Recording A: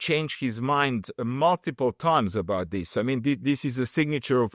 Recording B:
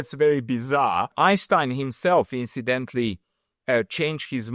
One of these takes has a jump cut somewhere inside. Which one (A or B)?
B